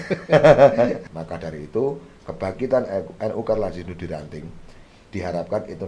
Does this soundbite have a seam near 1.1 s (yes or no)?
yes